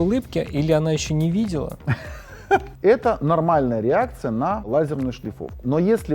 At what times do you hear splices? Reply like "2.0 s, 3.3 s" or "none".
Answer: 2.7 s, 4.7 s